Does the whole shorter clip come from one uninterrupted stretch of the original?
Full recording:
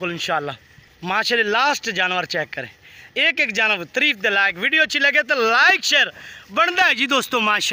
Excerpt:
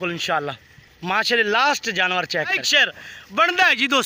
no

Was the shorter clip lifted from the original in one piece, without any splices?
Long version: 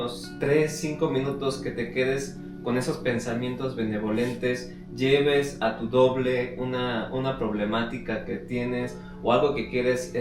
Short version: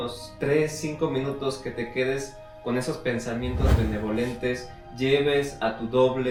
yes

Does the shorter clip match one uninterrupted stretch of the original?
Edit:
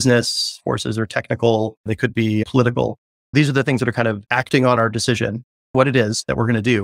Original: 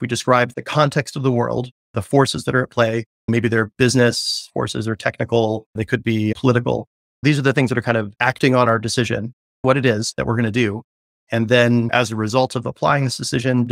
yes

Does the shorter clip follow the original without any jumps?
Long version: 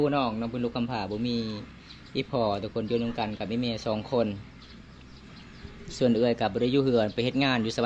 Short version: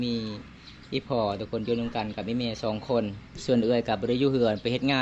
no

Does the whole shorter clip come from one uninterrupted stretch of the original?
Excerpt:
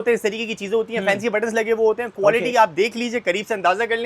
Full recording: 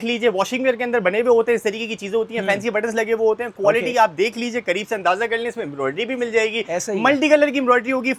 yes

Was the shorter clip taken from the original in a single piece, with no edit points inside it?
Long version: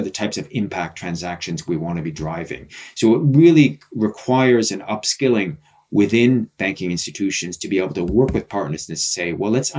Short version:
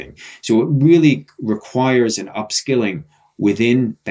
yes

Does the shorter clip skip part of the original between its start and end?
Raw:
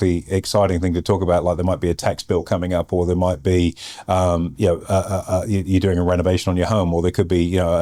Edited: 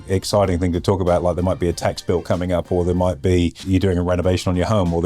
yes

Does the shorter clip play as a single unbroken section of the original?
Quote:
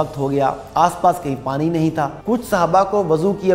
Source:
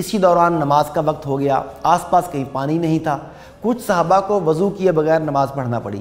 no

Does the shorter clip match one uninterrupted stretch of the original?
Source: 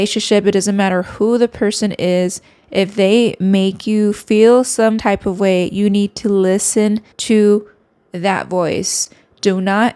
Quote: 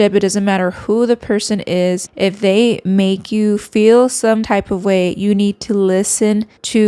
no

